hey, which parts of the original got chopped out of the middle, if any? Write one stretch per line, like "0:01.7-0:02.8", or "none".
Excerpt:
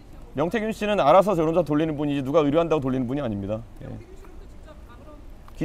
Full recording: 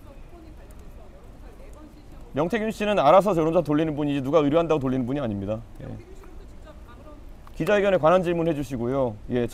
none

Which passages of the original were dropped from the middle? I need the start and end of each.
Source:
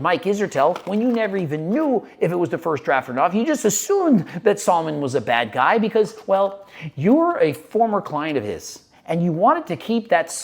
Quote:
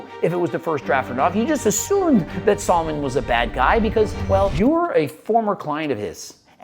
0:06.5-0:07.0

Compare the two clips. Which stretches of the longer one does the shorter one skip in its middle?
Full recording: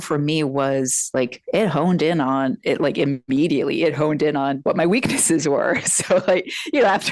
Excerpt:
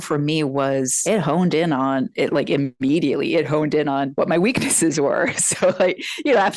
0:01.0-0:01.4

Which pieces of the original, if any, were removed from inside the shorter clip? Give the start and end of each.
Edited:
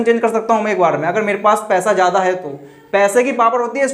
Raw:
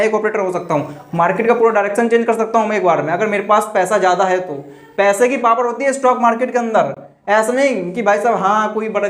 none

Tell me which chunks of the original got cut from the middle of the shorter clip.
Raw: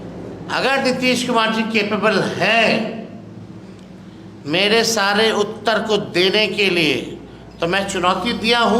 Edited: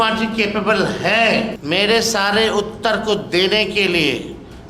0:02.9-0:04.4

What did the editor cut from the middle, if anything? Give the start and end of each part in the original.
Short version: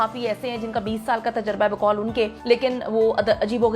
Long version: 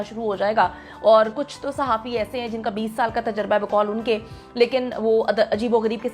0:04.3-0:04.5

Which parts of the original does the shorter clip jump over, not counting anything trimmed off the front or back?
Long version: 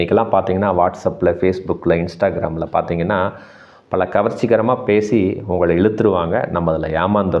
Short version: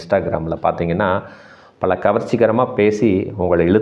none

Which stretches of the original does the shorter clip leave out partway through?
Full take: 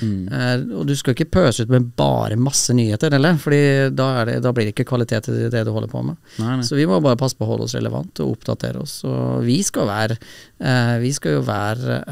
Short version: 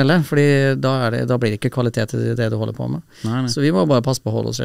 none

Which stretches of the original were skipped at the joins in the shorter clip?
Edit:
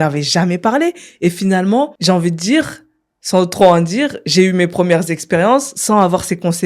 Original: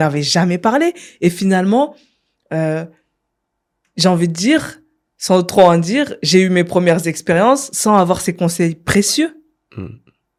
0:02.0-0:03.9

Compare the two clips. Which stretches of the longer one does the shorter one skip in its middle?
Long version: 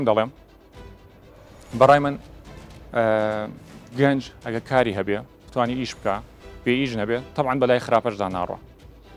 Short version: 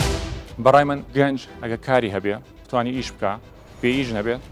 0:02.2-0:03.9

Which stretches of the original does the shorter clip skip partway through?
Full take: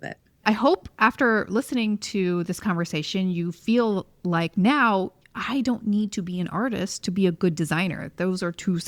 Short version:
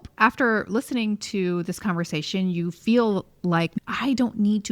0:04.5-0:05.2

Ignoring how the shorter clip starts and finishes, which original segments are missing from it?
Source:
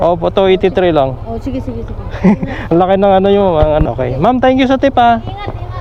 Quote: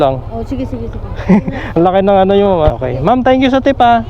0:03.7-0:03.9

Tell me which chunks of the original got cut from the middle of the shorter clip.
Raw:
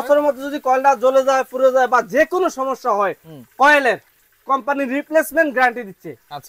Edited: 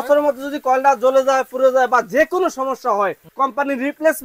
0:03.2-0:04.3

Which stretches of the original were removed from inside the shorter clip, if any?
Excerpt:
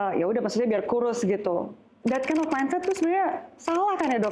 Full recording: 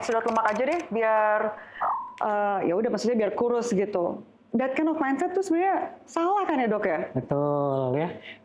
none

